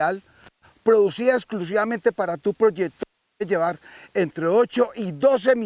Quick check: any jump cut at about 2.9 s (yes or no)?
no